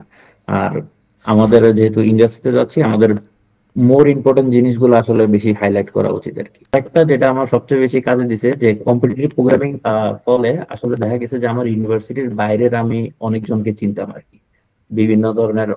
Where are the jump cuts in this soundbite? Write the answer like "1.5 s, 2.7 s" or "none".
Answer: 6.7 s, 9.7 s